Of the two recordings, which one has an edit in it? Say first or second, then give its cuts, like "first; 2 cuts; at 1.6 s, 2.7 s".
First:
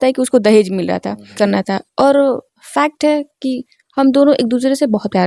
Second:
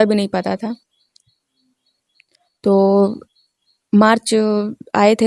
first; 1 cut; at 1.4 s